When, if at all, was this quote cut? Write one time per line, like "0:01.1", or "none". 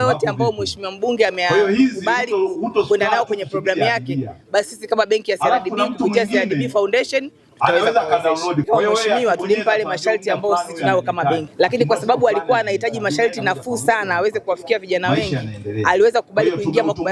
0:08.7
0:11.5

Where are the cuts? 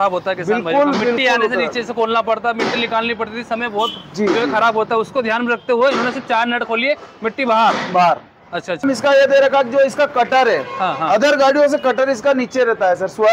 0:08.8

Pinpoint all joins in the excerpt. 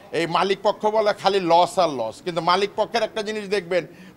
none

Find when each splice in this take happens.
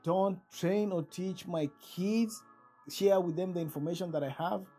0:02.8

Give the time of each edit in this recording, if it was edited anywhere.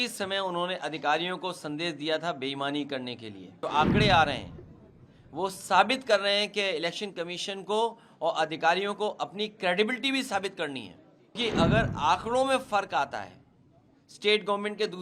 0:03.6
0:11.4

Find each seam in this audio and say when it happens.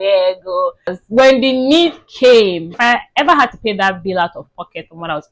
0:01.0
0:02.7

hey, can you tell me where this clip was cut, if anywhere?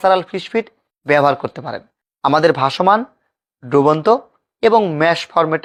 none

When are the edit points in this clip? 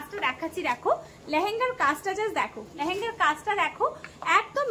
none

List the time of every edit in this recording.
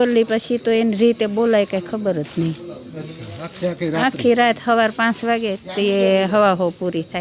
none

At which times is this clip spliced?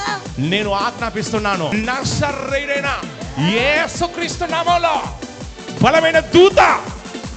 0:01.7

